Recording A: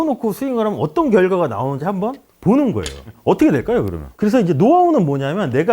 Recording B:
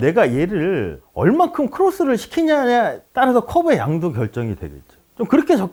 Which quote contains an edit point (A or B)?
A